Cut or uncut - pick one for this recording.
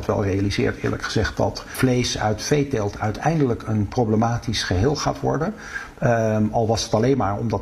cut